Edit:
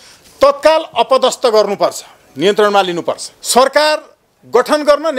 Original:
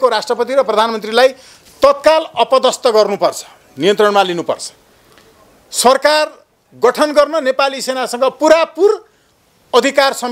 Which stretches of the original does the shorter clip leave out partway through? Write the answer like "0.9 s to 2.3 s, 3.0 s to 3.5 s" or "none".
4.7 s to 5.6 s